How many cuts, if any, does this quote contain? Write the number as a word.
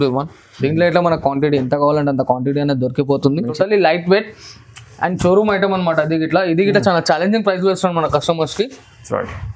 one